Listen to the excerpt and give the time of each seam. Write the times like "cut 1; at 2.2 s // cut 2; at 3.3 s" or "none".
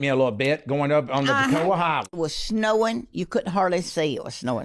cut 1; at 2.1 s